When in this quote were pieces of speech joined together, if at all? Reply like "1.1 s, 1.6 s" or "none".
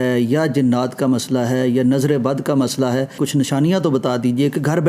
3.2 s